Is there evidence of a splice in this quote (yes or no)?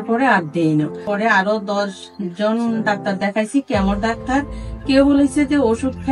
yes